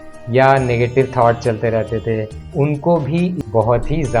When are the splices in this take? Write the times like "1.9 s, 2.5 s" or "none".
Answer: 2.4 s, 3.4 s